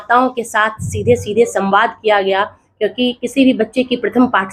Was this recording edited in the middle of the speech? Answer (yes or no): no